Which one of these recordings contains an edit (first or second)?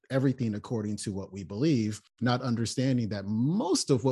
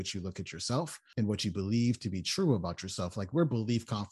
second